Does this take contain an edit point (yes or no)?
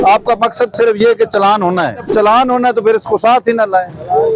yes